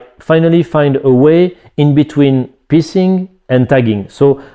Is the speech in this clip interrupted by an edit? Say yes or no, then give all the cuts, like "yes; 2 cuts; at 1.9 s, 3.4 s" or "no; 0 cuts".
no; 0 cuts